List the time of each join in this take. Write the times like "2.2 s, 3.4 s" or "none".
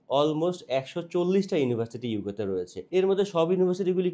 2.8 s